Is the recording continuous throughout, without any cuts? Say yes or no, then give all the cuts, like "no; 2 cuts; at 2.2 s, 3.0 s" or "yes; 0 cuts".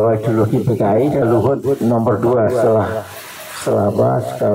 no; 1 cut; at 1.2 s